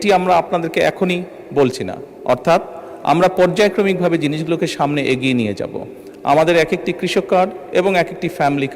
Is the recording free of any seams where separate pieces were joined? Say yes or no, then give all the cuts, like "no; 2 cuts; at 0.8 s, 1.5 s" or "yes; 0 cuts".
yes; 0 cuts